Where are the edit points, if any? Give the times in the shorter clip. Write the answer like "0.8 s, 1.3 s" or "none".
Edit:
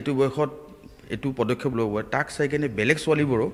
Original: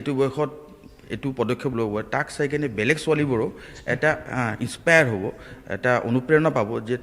none